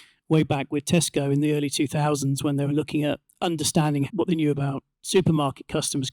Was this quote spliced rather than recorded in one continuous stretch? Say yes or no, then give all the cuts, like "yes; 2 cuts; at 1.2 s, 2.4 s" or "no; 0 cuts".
yes; 1 cut; at 4.1 s